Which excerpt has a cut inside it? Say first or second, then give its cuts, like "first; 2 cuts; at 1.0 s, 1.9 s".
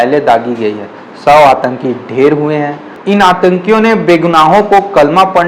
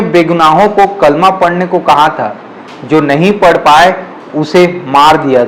first; 1 cut; at 3.0 s